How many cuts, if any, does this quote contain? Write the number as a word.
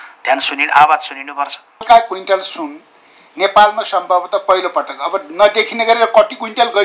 one